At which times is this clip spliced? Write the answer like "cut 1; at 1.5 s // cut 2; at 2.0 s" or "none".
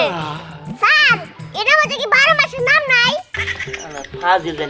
cut 1; at 3.3 s

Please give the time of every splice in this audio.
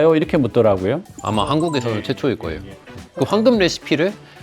cut 1; at 1.1 s // cut 2; at 3.0 s

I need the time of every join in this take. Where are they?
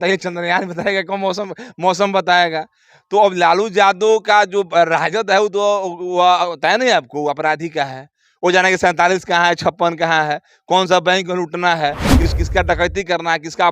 cut 1; at 12.3 s

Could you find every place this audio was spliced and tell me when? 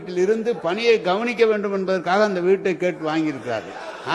none

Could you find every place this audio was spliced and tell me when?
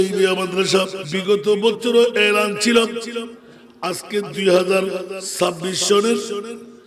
cut 1; at 1.0 s // cut 2; at 5.2 s

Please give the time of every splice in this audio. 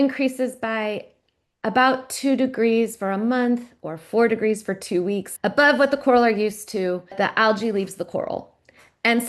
cut 1; at 5.3 s // cut 2; at 7.1 s

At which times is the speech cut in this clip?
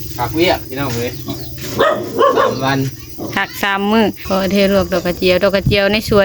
cut 1; at 4.2 s

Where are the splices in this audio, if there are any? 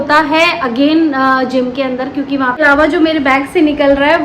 cut 1; at 2.6 s

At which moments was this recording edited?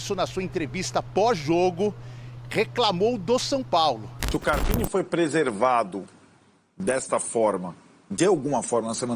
cut 1; at 4.2 s

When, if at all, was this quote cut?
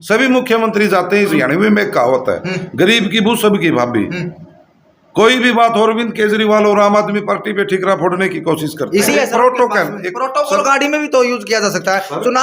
cut 1; at 1.3 s // cut 2; at 9.1 s

